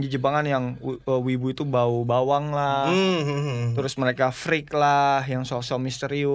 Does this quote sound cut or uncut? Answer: uncut